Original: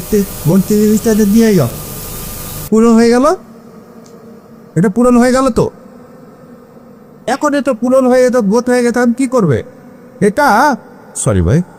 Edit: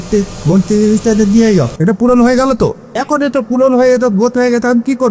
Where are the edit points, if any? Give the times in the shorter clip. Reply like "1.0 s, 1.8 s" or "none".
1.7 s, 3.1 s